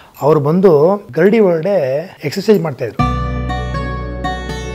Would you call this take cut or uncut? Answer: cut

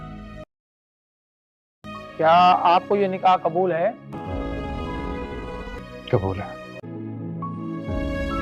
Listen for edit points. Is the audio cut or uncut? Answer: uncut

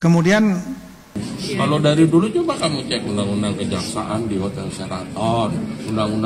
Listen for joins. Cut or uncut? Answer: cut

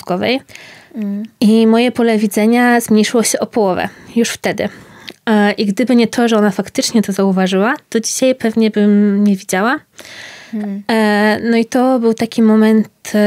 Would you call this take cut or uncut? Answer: uncut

